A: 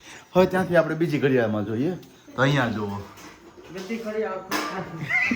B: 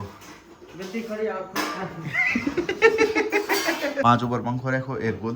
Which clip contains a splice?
B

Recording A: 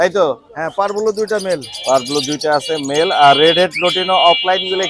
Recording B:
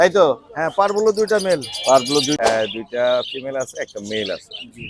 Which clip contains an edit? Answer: B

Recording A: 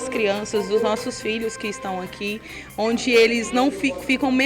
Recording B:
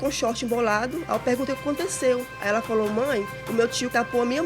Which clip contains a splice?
B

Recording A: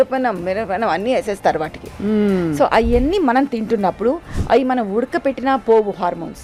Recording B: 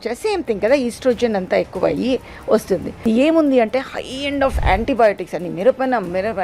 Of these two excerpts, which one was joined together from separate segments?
B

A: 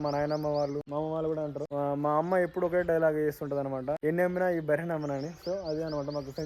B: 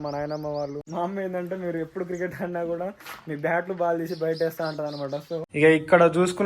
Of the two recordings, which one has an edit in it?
B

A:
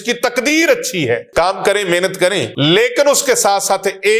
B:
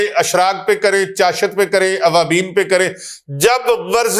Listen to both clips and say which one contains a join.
A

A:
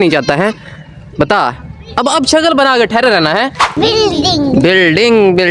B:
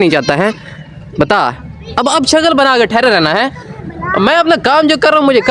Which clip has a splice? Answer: A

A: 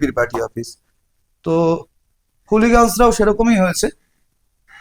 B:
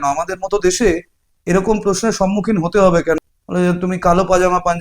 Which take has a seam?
B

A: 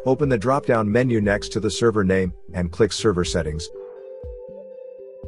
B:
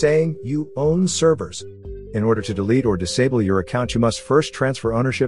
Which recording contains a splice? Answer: A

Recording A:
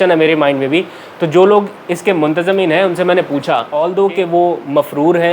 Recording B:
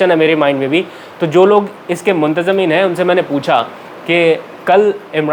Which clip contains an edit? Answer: A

